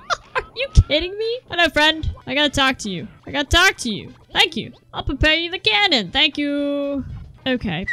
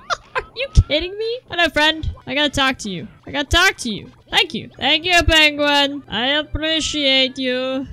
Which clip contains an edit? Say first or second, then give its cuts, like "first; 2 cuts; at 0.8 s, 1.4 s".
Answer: second; 1 cut; at 4.3 s